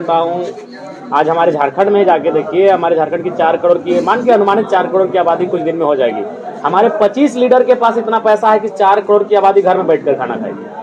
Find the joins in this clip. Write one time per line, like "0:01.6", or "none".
none